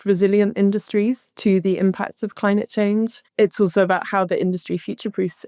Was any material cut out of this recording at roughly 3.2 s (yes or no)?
yes